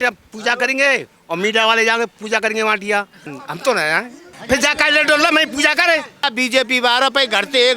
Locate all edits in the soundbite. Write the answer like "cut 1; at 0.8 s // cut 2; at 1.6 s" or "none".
cut 1; at 3.2 s // cut 2; at 4.3 s // cut 3; at 6.3 s